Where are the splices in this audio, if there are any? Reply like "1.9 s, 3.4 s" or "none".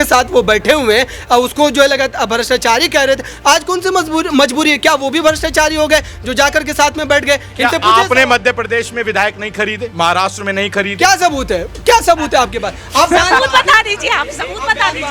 none